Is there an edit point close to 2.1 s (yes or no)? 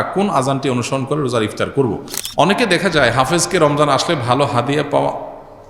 yes